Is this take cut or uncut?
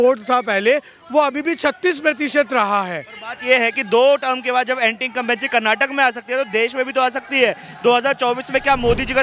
uncut